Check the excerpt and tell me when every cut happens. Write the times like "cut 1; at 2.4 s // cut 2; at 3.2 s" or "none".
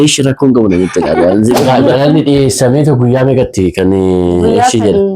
cut 1; at 1.7 s